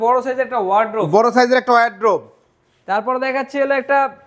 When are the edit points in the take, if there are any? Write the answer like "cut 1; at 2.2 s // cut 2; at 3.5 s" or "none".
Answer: none